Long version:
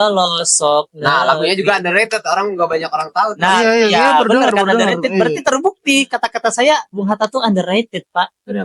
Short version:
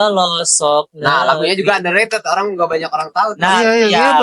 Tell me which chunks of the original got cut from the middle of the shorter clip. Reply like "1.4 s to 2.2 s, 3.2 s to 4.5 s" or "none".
none